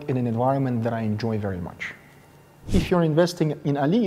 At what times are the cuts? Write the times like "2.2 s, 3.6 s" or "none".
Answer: 2.6 s